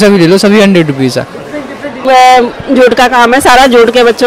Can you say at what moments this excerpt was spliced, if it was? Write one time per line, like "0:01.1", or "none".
0:02.0